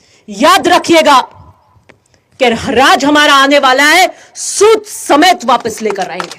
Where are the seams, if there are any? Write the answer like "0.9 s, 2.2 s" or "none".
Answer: none